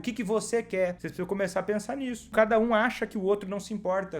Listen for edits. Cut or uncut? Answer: cut